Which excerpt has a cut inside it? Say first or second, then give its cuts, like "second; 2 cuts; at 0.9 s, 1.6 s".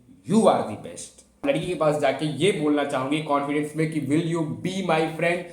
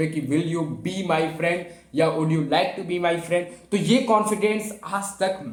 first; 1 cut; at 1.4 s